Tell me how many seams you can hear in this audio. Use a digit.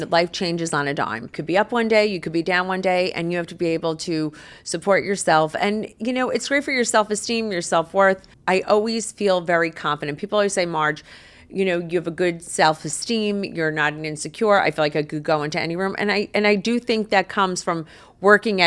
2